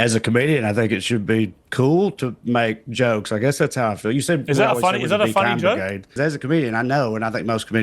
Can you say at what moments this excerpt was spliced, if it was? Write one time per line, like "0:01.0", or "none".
0:06.1